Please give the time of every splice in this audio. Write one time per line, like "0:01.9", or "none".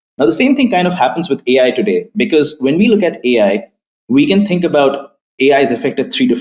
none